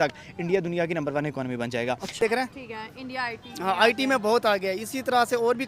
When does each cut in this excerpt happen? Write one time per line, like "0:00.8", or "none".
0:02.2